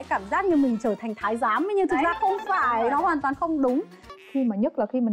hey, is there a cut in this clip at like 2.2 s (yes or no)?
no